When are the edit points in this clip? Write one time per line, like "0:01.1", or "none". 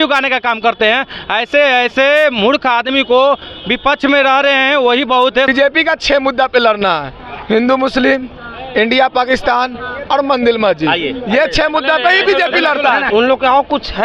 0:05.5
0:13.0